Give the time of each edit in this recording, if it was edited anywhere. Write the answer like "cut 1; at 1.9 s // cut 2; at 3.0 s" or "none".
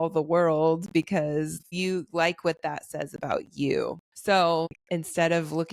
cut 1; at 1.7 s // cut 2; at 4.1 s // cut 3; at 4.8 s